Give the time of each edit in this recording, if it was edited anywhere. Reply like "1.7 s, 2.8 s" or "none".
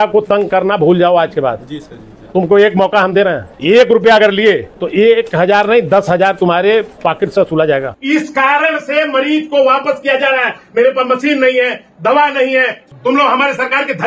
3.5 s, 4.7 s, 6.9 s, 7.9 s, 12.8 s